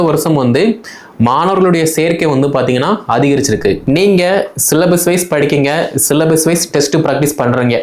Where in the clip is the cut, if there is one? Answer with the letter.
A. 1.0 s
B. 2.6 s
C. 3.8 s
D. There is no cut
C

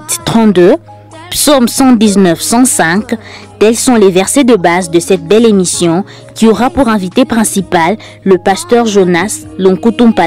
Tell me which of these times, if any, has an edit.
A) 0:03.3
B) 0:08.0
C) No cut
C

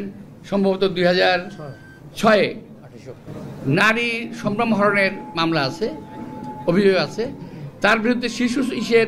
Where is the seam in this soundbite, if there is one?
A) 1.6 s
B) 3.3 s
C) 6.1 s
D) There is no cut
B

